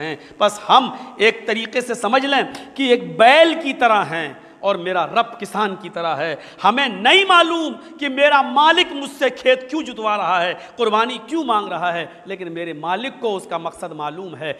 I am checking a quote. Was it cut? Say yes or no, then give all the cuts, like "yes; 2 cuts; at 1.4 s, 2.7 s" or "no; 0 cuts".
no; 0 cuts